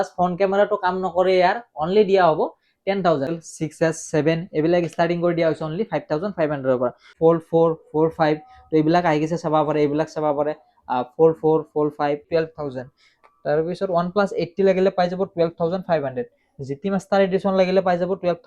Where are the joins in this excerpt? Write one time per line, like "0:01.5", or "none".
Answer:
0:03.4
0:07.0
0:12.3